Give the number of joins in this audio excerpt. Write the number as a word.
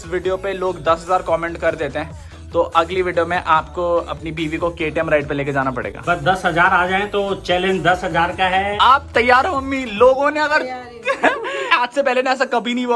zero